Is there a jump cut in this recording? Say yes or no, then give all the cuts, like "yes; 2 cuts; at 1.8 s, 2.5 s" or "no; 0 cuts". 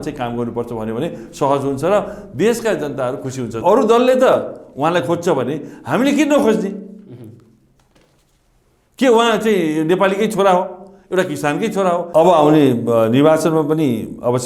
yes; 2 cuts; at 3.6 s, 12.1 s